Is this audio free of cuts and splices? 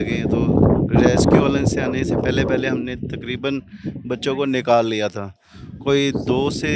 yes; 0 cuts

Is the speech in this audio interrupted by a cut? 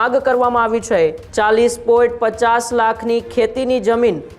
yes; 1 cut; at 1.2 s

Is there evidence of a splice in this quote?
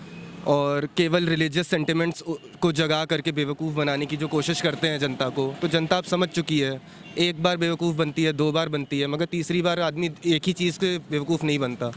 no; 0 cuts

